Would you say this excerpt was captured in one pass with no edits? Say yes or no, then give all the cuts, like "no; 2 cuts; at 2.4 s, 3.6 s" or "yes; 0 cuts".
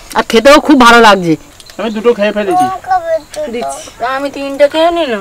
yes; 0 cuts